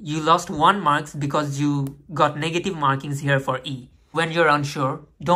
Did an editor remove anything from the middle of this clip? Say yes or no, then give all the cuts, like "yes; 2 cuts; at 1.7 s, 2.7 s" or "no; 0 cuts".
yes; 1 cut; at 4.0 s